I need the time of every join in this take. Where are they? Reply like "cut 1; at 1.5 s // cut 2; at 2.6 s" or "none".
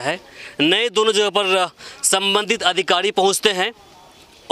none